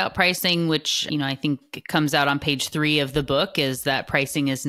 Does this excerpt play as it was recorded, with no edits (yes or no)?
no